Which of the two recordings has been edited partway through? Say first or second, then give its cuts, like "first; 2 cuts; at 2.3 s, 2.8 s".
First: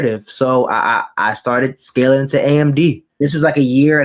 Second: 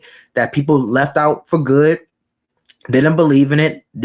first; 1 cut; at 3.1 s